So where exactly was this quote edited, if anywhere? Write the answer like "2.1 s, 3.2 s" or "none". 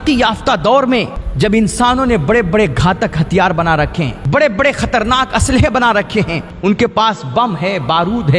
1.2 s, 4.2 s, 6.4 s